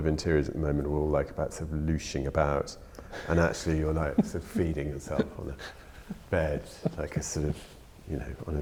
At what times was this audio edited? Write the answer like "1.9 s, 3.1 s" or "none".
none